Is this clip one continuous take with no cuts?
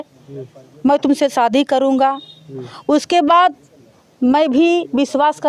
yes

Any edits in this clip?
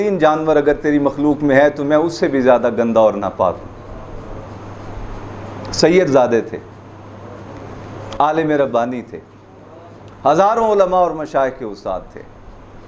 no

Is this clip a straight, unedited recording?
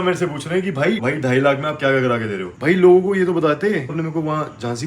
no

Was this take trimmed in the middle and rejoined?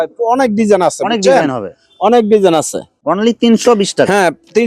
yes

